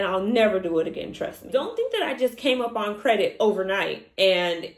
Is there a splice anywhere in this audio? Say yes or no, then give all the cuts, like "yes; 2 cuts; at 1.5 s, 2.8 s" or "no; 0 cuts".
yes; 1 cut; at 1.4 s